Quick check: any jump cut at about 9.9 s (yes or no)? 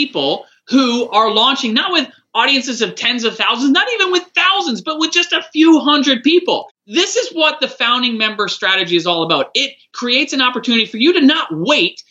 yes